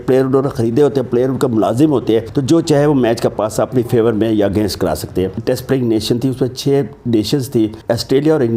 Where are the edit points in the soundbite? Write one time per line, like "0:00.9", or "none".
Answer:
0:02.3
0:05.4
0:07.8